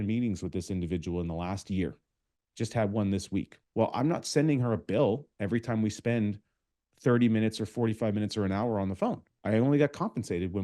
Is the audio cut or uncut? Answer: cut